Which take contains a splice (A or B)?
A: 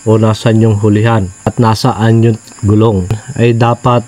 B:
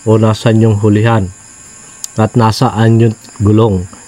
A